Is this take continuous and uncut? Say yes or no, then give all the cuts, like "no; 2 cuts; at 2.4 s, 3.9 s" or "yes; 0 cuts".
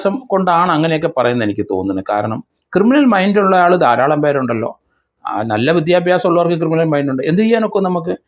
yes; 0 cuts